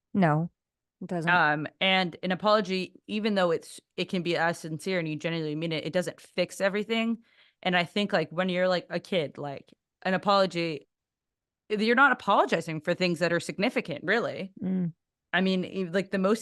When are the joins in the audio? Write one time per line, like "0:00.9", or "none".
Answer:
none